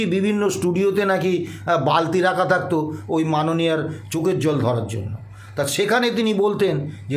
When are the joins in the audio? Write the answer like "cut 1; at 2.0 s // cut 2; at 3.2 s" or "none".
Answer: none